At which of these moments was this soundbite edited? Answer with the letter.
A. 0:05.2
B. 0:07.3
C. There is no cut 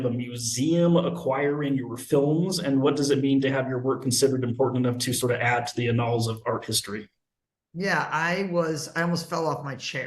C